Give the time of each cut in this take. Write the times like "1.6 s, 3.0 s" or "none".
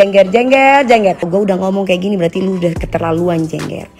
1.3 s